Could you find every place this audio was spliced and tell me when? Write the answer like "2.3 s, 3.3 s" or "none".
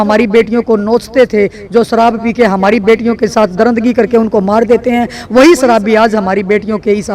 none